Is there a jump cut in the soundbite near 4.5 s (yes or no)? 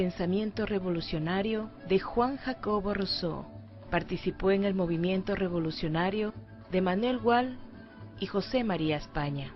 yes